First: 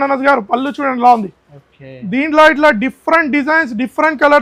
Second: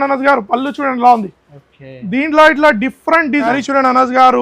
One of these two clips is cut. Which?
second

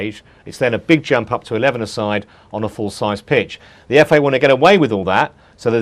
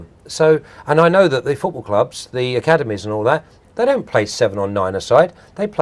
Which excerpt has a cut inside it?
first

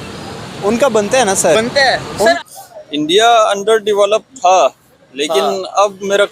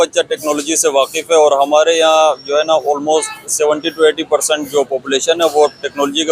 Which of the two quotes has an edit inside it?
first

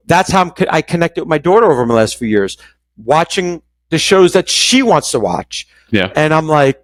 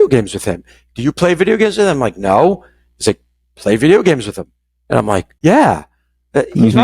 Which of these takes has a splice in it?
second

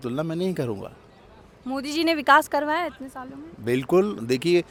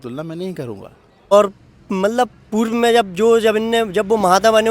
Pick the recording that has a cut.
second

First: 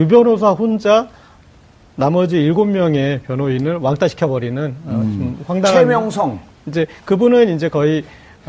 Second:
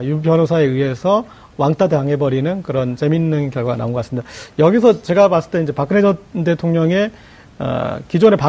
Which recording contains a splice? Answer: second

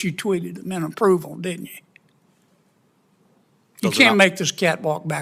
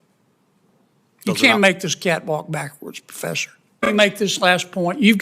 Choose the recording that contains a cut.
second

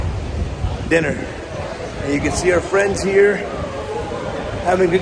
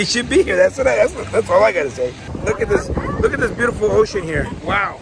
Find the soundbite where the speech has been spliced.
second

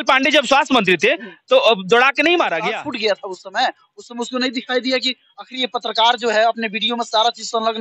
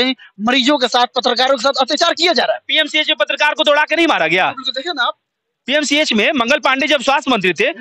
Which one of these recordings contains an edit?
first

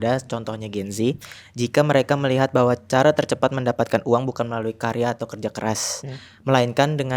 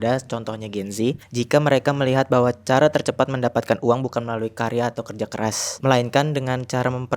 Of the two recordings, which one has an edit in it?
second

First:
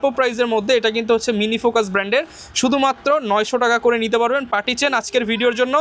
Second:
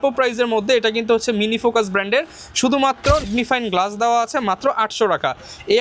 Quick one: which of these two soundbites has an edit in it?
second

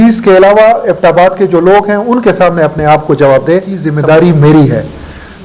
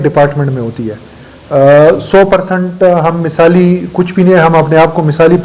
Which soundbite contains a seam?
first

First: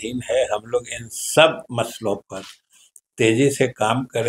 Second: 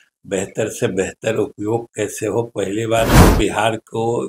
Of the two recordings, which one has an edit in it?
second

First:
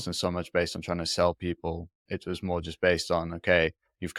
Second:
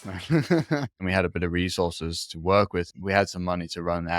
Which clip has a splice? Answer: second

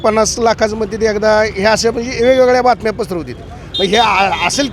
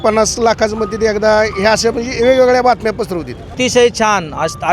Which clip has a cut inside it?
second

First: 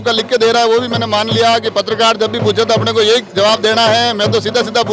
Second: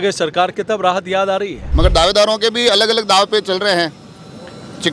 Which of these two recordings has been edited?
second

